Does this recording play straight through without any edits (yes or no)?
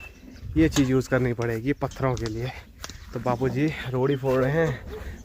yes